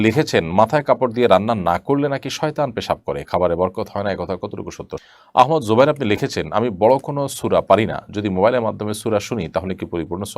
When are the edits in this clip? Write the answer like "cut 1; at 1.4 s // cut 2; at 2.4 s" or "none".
cut 1; at 5.0 s